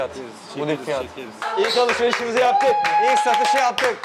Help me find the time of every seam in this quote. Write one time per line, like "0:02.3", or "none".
0:01.3